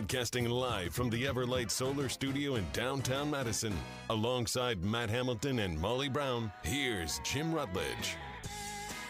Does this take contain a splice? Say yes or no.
no